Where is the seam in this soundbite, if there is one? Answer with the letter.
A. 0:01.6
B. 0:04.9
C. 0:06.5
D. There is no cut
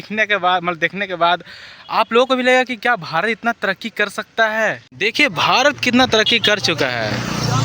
B